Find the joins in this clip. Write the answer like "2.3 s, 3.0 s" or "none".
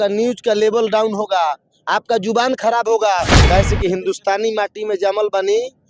3.3 s